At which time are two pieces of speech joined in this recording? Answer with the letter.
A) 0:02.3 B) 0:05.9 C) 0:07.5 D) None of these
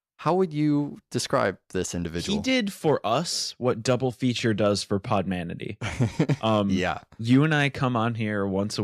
C